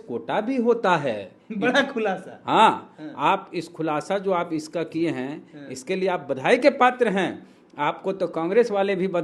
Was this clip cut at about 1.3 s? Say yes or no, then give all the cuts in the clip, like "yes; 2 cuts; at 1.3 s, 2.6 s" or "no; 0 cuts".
no; 0 cuts